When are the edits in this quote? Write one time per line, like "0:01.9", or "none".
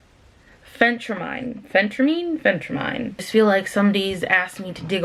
0:03.1